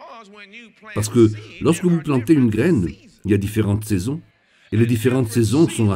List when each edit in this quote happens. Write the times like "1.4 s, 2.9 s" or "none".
0.9 s